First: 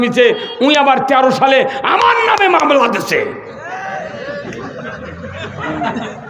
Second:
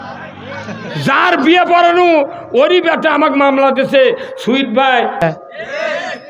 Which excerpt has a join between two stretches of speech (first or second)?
second